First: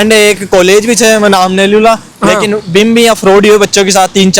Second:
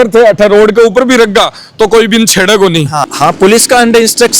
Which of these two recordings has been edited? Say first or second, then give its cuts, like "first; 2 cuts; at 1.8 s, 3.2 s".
second; 1 cut; at 3.0 s